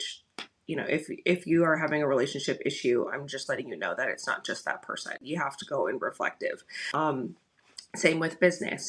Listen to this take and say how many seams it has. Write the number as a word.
two